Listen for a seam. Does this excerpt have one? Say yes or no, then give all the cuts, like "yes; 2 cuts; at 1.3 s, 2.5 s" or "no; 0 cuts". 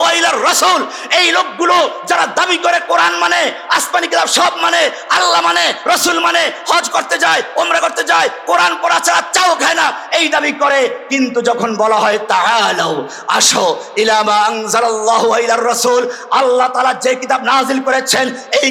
no; 0 cuts